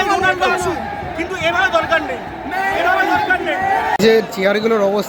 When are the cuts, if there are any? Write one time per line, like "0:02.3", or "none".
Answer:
none